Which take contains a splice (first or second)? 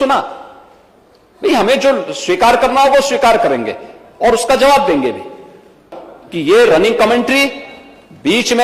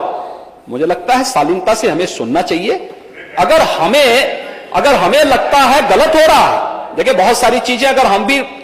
first